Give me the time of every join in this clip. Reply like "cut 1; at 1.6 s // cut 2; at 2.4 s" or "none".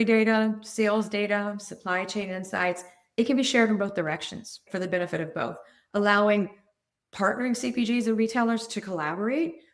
none